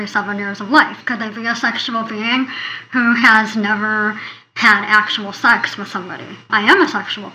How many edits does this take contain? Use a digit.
2